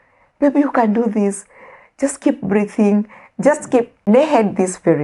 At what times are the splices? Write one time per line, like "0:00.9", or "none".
0:04.1